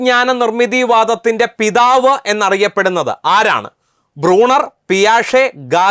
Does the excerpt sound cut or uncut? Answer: uncut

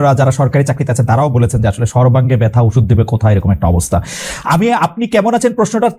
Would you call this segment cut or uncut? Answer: uncut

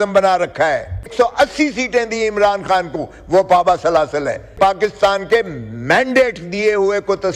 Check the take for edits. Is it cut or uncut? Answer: cut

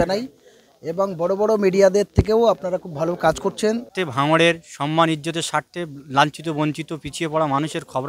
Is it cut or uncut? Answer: cut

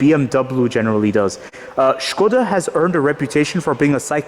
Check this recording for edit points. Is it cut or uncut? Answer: cut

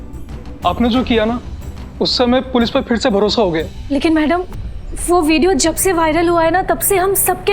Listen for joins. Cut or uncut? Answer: cut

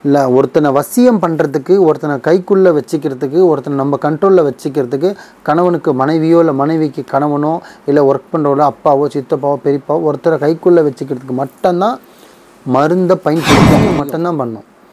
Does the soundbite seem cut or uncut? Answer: cut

